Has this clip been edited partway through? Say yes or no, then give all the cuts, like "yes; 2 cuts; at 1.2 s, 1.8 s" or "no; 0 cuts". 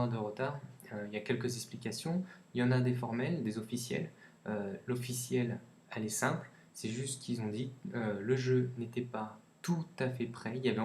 yes; 1 cut; at 8.6 s